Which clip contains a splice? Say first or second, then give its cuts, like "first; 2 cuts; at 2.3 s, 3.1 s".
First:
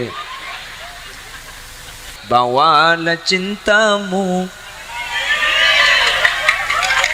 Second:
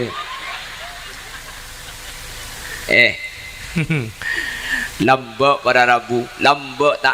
first; 1 cut; at 2.1 s